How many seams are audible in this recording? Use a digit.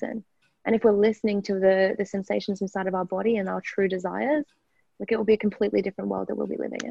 0